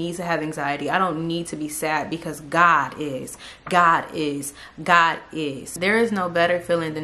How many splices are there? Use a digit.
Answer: 1